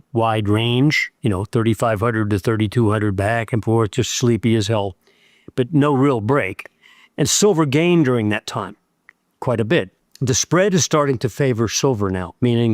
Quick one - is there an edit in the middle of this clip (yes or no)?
no